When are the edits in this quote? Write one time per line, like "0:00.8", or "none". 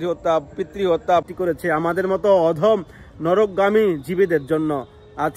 0:01.2